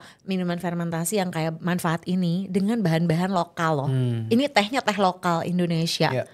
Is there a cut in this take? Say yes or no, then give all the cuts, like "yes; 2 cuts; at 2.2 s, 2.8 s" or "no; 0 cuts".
no; 0 cuts